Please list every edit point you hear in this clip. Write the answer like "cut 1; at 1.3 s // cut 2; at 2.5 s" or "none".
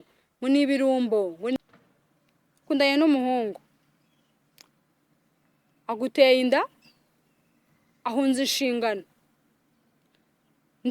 cut 1; at 1.6 s